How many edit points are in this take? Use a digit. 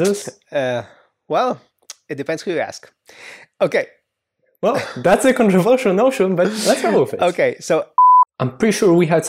1